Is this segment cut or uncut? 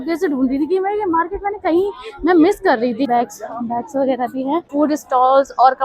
cut